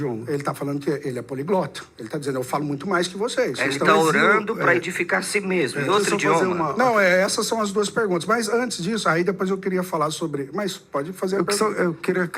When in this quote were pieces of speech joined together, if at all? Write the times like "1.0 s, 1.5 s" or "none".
none